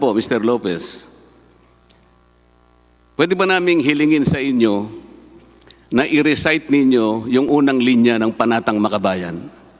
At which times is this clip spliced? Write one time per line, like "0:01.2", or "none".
none